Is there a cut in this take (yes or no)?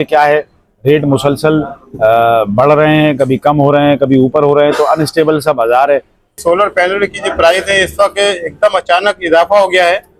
yes